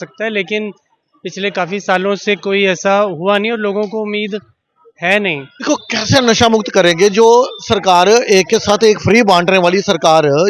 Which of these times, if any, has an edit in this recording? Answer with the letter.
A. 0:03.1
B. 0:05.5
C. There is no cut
B